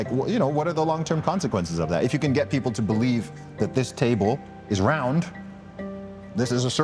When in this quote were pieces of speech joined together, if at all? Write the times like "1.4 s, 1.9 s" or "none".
none